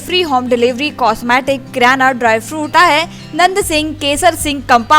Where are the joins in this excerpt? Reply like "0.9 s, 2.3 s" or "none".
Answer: 2.7 s